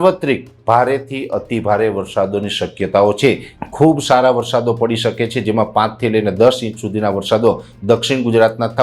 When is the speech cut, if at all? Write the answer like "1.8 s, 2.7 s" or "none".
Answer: 3.5 s